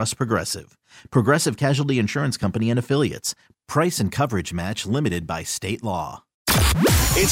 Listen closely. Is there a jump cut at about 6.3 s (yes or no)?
yes